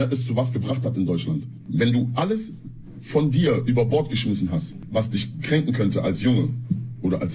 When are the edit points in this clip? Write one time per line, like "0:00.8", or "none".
0:01.6
0:04.8